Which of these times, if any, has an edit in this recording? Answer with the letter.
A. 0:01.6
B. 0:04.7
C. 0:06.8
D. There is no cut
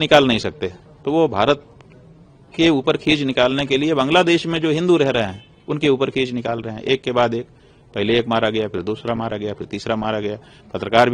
D